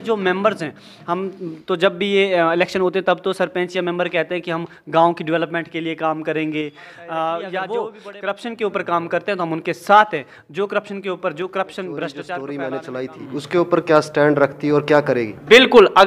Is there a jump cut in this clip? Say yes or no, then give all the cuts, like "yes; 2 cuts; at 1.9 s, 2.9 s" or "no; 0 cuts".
yes; 2 cuts; at 7.6 s, 12.4 s